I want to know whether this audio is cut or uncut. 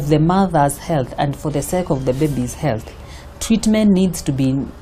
uncut